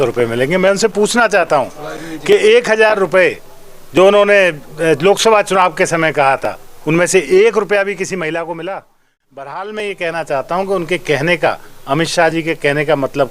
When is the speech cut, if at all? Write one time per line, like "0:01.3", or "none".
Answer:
0:09.1